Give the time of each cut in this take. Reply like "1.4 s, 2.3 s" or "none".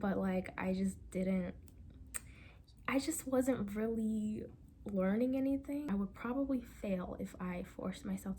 5.9 s